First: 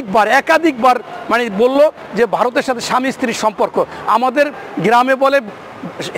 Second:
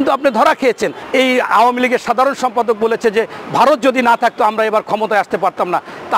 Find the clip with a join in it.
second; 1 cut; at 1.0 s

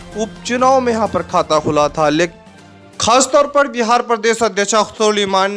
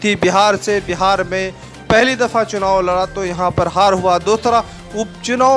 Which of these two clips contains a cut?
first; 1 cut; at 2.3 s

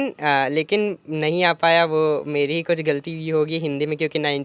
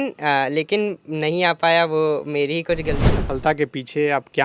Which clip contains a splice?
second; 1 cut; at 3.1 s

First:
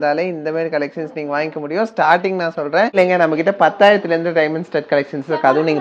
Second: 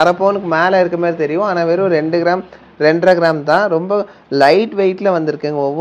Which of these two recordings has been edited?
first; 1 cut; at 2.9 s

